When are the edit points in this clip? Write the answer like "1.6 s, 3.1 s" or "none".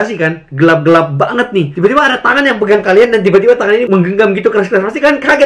none